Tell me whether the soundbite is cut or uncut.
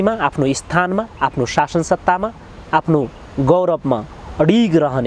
uncut